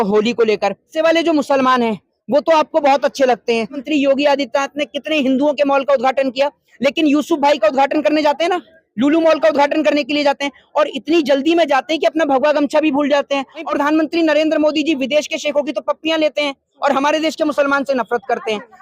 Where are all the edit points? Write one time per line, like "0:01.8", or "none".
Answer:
0:00.9
0:03.8
0:13.7